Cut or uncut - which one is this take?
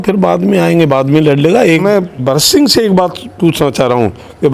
cut